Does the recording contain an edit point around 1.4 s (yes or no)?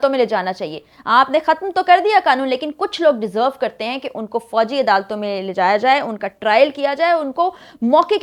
no